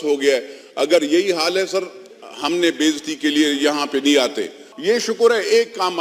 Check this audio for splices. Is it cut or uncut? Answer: cut